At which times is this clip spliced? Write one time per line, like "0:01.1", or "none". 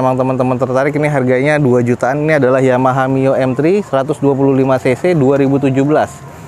none